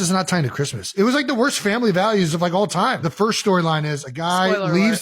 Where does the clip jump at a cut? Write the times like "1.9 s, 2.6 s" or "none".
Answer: 0.9 s, 3.0 s